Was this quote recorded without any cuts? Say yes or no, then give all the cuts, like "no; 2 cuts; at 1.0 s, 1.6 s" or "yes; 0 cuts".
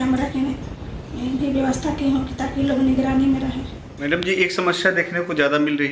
yes; 0 cuts